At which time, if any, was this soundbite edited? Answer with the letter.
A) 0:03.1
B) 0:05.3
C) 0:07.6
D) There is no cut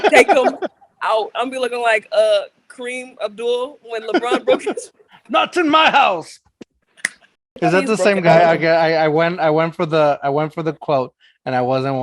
C